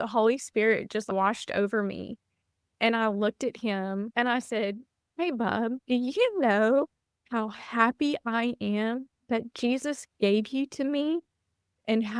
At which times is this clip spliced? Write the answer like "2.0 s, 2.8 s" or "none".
4.1 s, 5.8 s